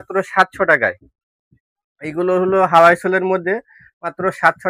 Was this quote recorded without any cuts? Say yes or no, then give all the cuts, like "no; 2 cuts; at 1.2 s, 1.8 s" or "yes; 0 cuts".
yes; 0 cuts